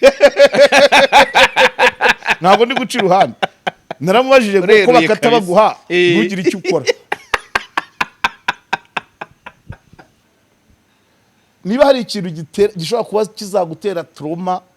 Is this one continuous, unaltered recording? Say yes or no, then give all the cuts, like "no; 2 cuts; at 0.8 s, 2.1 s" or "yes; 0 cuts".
no; 1 cut; at 10.1 s